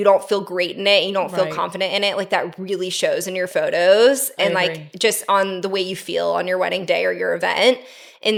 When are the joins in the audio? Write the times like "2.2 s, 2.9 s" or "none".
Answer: none